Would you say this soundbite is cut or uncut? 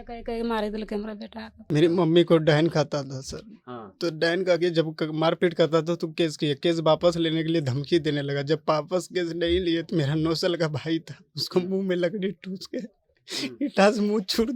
cut